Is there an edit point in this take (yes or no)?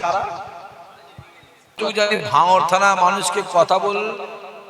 yes